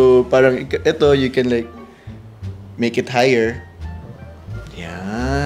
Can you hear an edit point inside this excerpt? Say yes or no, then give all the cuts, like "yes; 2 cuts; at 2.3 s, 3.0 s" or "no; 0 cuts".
no; 0 cuts